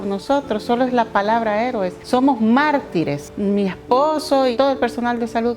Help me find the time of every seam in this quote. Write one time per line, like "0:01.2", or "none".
0:02.0
0:03.3
0:04.5